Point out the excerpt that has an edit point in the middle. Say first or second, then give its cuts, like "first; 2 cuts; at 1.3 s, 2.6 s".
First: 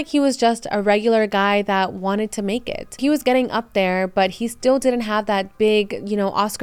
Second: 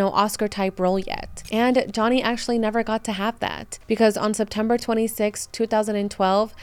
first; 1 cut; at 3.0 s